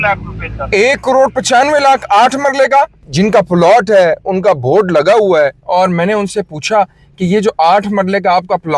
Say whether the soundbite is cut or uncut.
cut